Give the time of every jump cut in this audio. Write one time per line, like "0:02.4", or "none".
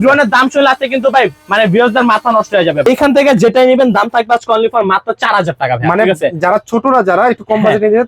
0:02.9